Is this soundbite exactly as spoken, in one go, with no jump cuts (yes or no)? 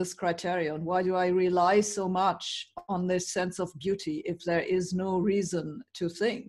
yes